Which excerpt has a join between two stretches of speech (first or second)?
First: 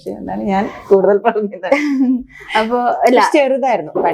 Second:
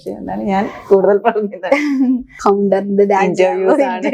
second